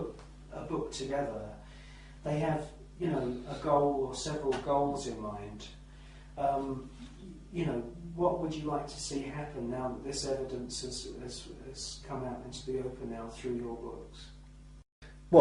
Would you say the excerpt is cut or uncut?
uncut